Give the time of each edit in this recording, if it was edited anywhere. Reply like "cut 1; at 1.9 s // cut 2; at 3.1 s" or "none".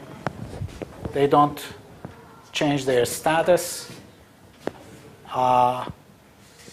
cut 1; at 5.4 s